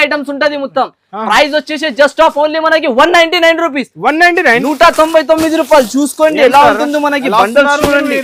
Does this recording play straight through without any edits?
yes; 0 cuts

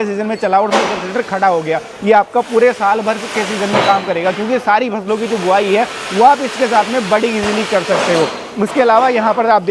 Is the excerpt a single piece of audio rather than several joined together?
yes; 0 cuts

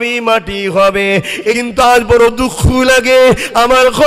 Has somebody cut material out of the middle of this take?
yes; 1 cut; at 1.6 s

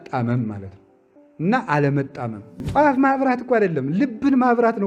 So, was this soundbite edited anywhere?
yes; 1 cut; at 2.7 s

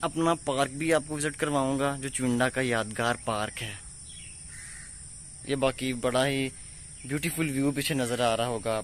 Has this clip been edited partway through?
no; 0 cuts

